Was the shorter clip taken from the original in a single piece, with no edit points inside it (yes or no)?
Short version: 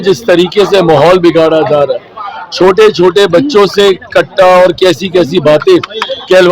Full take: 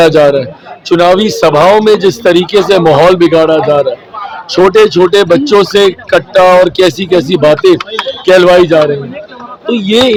yes